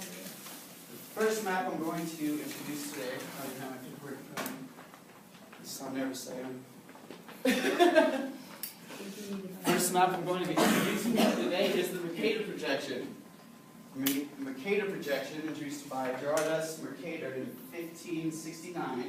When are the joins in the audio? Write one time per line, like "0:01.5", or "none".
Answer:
none